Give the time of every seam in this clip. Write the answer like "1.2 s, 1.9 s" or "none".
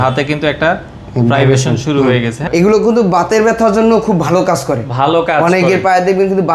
2.3 s